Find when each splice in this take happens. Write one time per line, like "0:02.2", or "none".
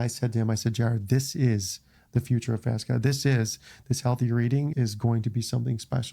0:04.7

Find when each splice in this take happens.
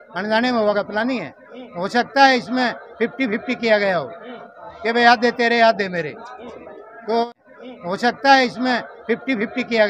0:07.3

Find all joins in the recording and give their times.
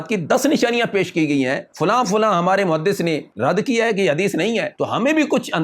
0:01.7
0:03.3
0:04.7

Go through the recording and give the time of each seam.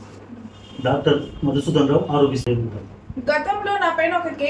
0:02.4

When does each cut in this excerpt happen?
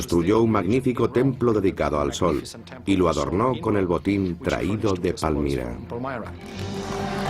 none

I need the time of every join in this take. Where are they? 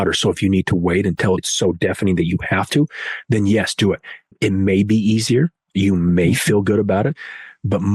0:01.5

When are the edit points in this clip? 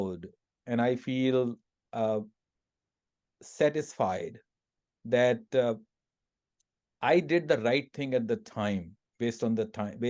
none

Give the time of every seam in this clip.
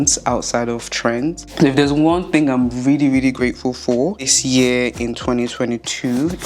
0:01.4
0:04.3

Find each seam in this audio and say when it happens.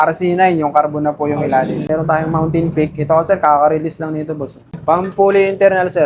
0:01.9
0:04.7

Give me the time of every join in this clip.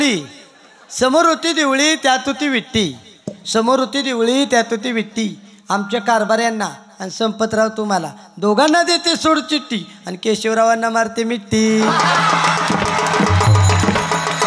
none

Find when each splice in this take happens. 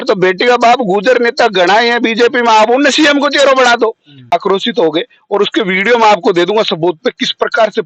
0:04.3

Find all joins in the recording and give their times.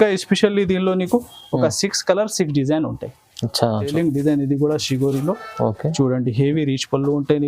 0:03.9

